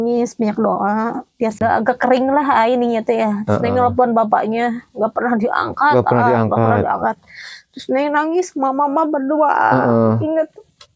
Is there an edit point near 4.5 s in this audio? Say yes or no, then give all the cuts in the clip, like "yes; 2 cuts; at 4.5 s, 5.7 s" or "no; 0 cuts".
no; 1 cut; at 1.6 s